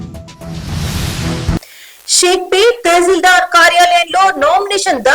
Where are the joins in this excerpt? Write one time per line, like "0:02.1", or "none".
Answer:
0:01.6